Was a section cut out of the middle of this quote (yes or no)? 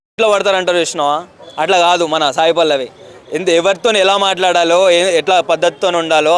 no